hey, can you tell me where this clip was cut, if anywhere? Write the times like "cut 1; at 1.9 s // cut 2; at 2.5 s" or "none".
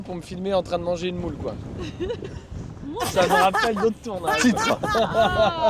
none